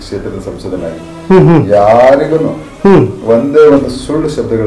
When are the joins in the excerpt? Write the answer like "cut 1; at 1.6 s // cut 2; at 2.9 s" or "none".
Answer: none